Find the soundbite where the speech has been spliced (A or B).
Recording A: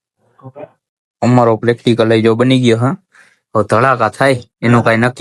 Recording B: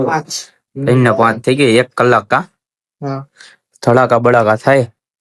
A